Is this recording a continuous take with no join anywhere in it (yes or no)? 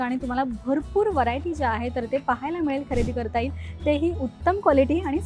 yes